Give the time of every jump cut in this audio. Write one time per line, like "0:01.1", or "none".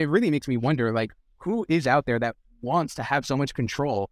none